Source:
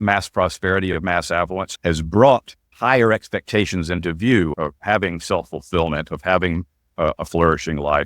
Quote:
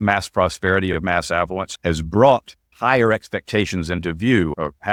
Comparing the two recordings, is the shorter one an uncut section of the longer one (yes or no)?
yes